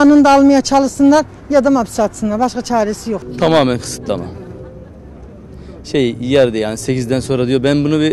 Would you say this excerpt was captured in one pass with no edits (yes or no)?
yes